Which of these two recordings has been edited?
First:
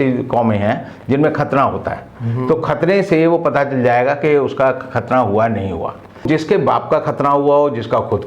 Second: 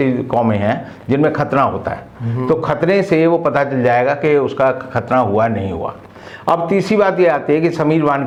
first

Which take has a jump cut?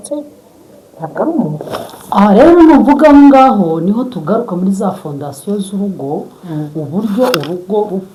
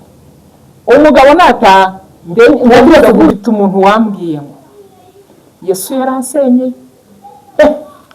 second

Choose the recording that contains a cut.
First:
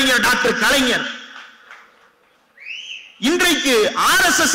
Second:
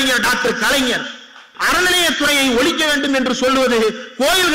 second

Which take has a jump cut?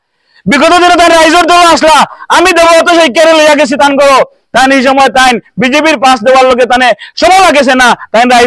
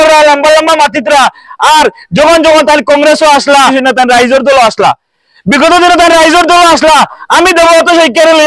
second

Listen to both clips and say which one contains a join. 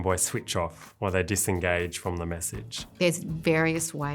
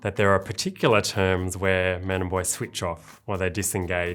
first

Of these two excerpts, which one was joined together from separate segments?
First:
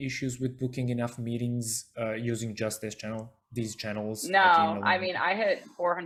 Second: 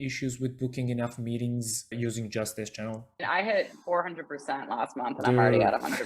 second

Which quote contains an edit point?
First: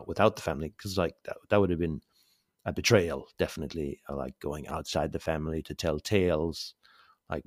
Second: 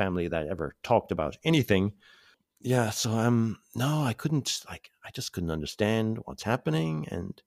second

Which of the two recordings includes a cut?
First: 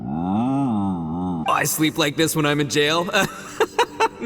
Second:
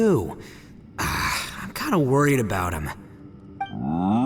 first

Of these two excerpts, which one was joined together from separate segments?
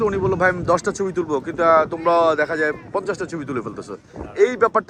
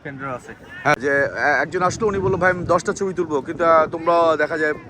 second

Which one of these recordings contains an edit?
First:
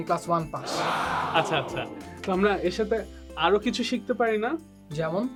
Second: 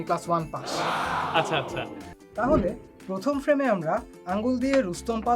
second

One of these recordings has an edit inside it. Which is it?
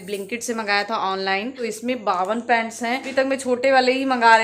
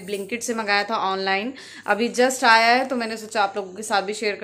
first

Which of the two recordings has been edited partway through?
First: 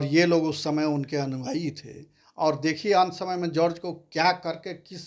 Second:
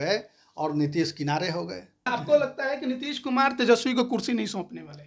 second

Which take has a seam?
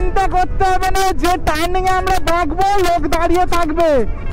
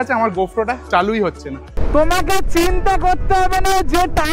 second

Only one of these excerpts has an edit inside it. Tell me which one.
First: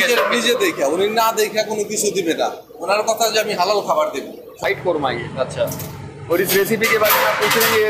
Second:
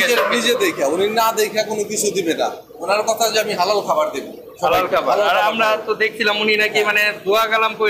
first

